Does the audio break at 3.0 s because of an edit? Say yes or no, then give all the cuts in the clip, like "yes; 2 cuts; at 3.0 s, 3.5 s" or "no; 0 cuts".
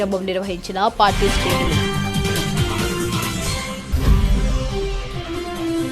yes; 2 cuts; at 1.7 s, 3.0 s